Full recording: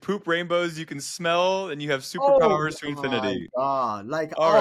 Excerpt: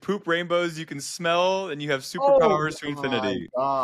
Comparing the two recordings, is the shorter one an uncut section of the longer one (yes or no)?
yes